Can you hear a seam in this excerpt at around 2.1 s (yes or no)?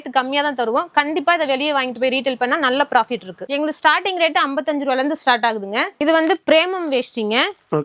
no